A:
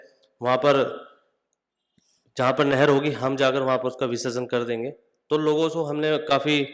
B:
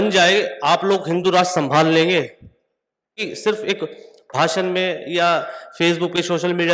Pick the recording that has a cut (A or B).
B